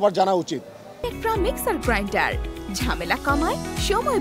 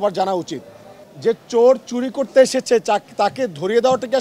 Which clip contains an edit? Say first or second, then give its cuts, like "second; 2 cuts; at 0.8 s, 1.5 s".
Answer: second; 1 cut; at 1.1 s